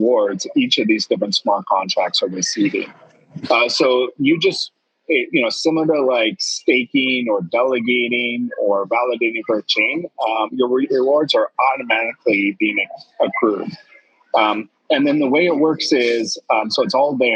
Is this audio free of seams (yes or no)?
yes